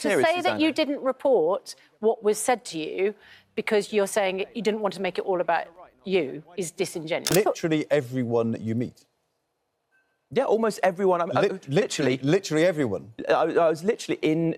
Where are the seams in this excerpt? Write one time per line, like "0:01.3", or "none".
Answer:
0:07.3